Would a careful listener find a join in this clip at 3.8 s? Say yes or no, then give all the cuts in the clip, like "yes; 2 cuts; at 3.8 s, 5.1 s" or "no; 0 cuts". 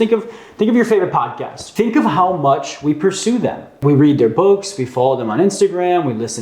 yes; 2 cuts; at 1.6 s, 3.8 s